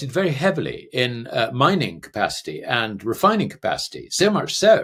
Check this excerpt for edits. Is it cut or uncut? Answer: uncut